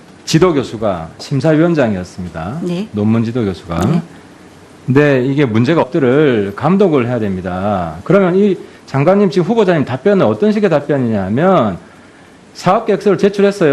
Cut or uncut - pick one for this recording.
uncut